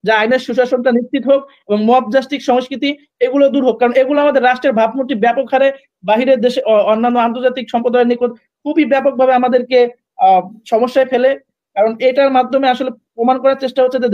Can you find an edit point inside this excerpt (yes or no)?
no